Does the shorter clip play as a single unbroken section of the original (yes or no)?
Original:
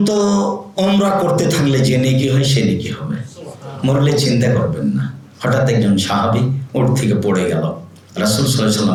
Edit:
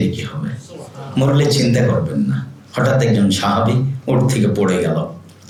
yes